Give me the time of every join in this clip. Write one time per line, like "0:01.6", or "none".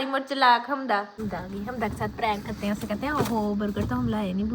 0:01.2